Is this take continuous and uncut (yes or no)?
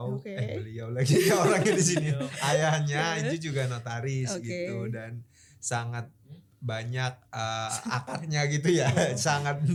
yes